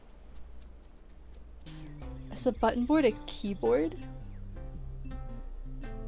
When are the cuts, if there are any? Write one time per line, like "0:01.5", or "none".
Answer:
0:01.7